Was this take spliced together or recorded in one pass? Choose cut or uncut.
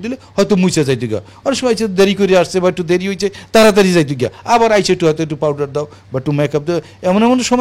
uncut